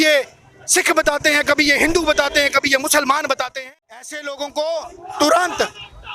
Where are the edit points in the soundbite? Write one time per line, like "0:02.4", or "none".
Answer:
0:03.5

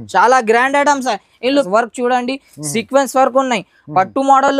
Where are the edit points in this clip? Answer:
0:01.6

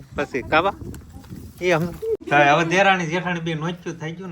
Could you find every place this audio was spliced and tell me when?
0:02.2

